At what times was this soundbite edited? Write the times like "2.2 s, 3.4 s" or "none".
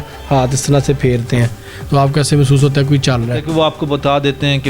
3.4 s